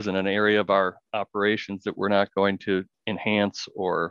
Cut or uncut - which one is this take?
uncut